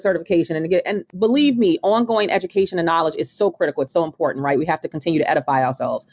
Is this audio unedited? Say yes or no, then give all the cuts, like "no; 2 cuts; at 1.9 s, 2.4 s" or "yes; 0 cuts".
no; 1 cut; at 1.0 s